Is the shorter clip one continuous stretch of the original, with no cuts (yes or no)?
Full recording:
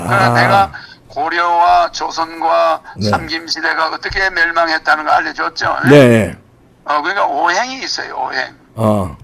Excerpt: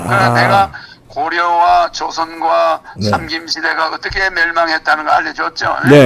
yes